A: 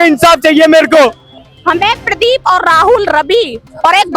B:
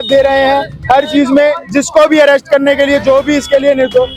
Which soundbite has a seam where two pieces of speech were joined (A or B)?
A